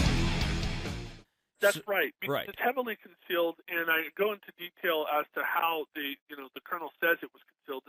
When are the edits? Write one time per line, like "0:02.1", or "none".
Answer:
0:01.4